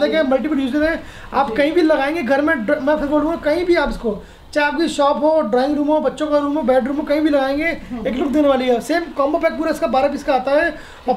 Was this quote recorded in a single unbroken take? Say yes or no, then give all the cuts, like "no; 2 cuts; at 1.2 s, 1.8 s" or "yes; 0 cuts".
yes; 0 cuts